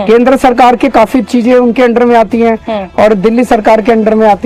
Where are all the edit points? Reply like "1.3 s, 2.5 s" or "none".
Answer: none